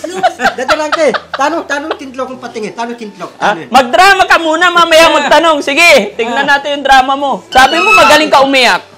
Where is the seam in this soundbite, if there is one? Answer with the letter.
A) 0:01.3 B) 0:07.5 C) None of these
B